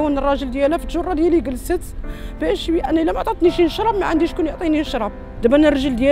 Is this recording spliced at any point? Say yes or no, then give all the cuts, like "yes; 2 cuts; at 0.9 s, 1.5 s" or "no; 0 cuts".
yes; 1 cut; at 5.2 s